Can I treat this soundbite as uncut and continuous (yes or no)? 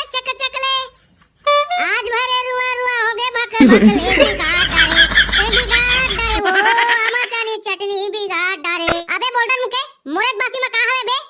no